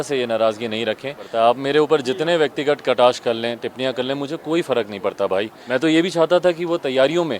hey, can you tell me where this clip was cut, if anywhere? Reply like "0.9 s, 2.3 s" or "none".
1.3 s, 5.6 s